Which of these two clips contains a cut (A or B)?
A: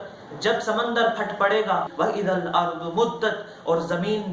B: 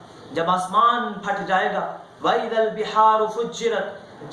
A